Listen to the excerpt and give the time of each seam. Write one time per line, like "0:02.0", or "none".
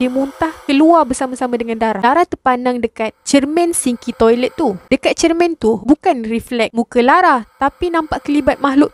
0:02.0
0:04.8